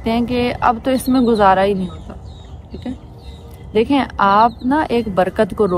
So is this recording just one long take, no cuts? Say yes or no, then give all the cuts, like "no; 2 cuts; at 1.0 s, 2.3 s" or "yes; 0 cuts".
yes; 0 cuts